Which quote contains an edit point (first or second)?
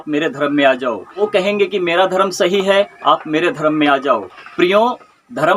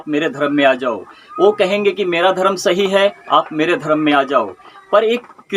first